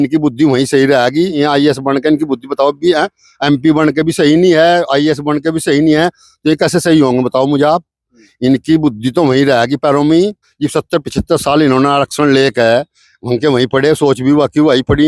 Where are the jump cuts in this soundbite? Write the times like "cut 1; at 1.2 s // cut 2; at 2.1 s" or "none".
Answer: none